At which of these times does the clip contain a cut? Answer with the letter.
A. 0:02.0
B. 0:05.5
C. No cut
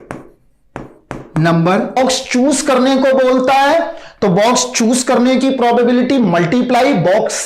A